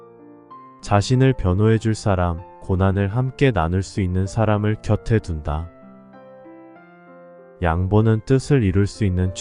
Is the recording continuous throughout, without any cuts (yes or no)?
yes